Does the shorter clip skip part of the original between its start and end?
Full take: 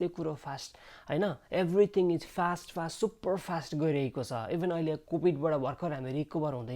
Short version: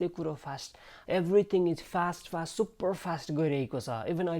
yes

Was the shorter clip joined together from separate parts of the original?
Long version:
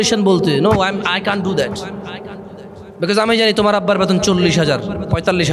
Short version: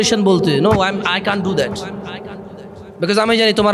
no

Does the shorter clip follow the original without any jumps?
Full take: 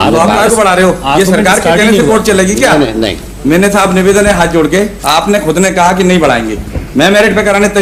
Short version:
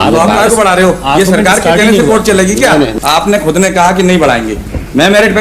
no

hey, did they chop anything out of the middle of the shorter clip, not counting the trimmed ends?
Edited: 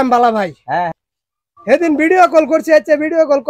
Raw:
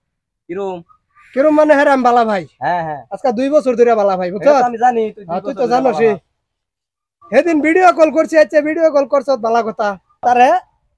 yes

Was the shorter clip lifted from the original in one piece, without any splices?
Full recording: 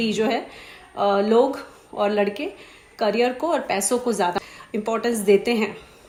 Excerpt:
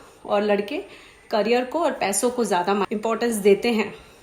no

